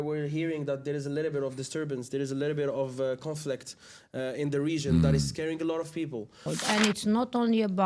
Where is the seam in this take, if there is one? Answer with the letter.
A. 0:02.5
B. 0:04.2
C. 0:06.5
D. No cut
C